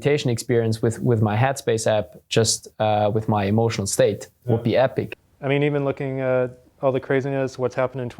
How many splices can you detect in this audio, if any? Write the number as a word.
one